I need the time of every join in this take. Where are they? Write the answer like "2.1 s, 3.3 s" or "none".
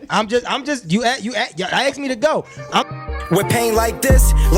2.9 s